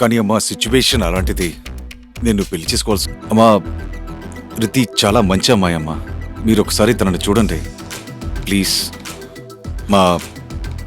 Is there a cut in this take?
yes; 1 cut; at 3.1 s

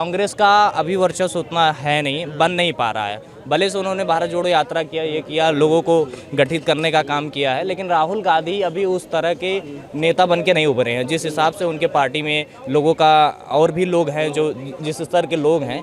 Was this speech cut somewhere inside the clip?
no; 0 cuts

